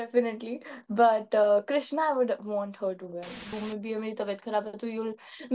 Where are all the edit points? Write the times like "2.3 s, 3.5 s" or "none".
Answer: 3.6 s